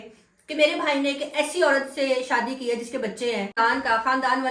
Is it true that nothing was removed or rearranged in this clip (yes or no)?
no